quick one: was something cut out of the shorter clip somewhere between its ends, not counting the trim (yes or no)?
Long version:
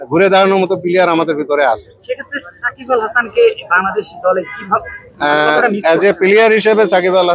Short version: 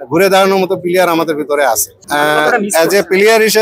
yes